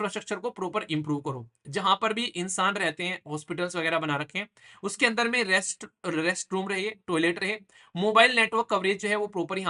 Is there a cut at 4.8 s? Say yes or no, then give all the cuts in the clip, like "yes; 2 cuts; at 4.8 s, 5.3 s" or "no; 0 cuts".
no; 0 cuts